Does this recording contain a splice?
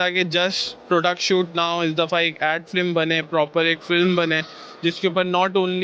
no; 0 cuts

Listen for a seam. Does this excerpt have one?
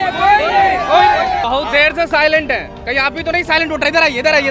yes; 1 cut; at 1.4 s

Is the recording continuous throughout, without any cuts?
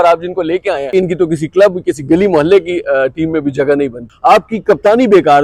no; 2 cuts; at 0.9 s, 4.0 s

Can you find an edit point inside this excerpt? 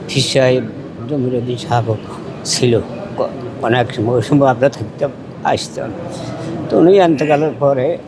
no; 0 cuts

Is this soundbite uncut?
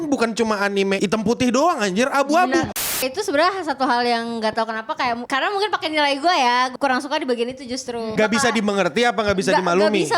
no; 5 cuts; at 1.0 s, 2.9 s, 5.2 s, 6.7 s, 8.1 s

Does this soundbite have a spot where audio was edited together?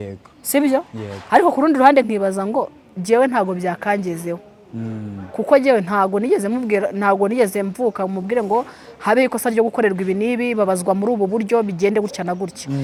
no; 0 cuts

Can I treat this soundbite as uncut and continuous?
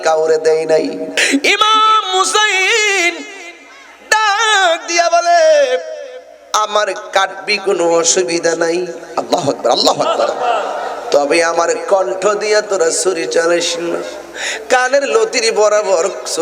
no; 1 cut; at 1.2 s

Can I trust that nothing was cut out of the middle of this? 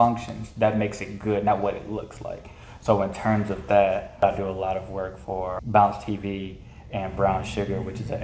no; 2 cuts; at 4.2 s, 5.6 s

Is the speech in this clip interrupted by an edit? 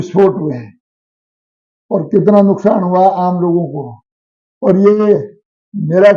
no; 0 cuts

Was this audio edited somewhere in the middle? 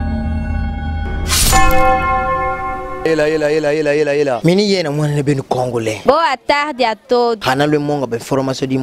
yes; 1 cut; at 1.2 s

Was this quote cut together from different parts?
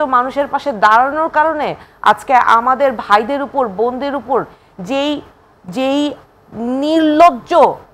no; 0 cuts

